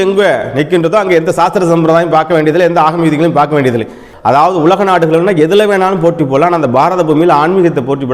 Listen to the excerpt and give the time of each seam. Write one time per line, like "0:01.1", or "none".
0:04.1